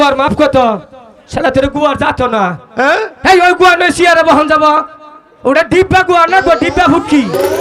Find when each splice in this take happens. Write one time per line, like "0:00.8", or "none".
none